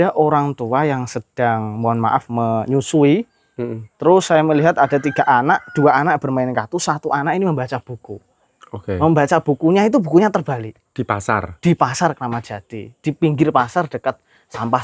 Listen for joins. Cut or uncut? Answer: uncut